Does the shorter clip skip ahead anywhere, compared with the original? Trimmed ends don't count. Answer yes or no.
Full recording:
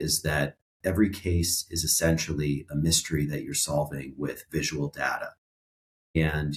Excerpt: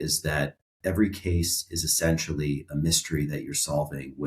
no